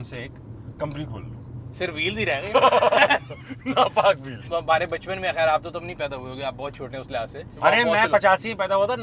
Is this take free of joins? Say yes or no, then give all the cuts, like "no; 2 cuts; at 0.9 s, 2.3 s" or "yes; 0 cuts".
no; 2 cuts; at 4.4 s, 7.5 s